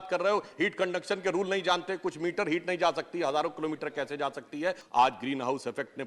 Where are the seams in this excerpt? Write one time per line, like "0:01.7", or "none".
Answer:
0:04.8